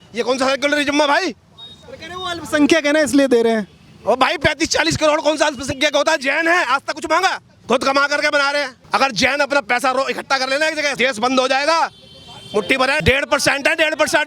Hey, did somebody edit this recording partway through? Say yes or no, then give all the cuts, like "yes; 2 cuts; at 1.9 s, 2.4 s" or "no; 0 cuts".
yes; 4 cuts; at 7.5 s, 8.8 s, 10.9 s, 13.0 s